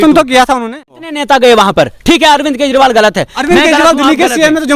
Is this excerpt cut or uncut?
cut